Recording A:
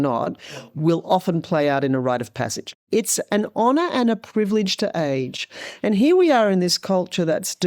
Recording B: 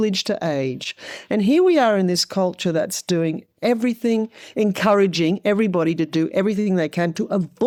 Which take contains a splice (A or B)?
A